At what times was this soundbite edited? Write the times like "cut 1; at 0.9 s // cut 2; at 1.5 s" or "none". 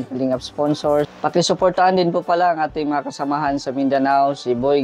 cut 1; at 1.1 s